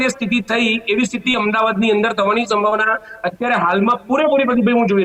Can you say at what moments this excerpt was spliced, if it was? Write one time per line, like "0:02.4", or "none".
none